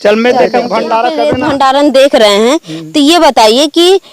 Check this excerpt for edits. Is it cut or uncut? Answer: cut